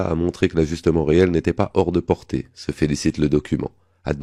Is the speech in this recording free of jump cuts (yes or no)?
yes